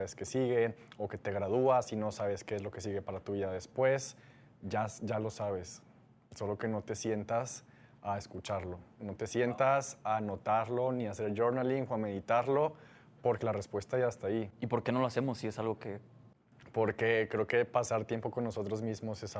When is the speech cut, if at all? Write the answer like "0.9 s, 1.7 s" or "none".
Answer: none